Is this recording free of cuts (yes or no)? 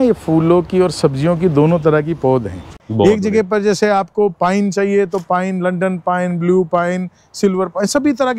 no